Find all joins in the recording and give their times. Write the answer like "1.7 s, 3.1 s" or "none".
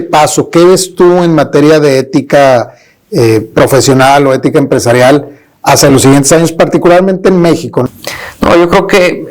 7.8 s